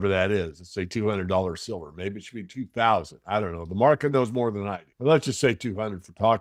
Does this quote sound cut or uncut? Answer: uncut